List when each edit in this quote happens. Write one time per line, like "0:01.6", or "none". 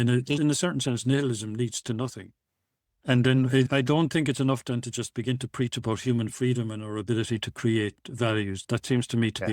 0:03.0